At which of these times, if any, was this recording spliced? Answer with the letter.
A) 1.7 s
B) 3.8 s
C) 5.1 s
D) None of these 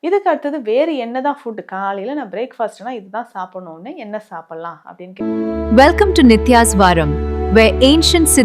C